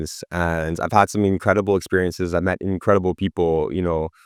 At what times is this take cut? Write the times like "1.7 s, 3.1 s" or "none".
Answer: none